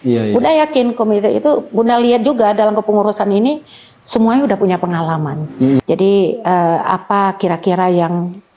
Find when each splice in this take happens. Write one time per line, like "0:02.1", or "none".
0:05.8